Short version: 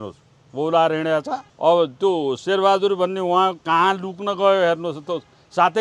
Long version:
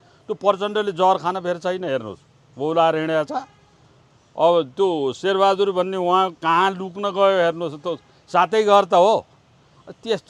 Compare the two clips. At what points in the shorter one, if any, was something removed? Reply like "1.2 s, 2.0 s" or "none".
1.4 s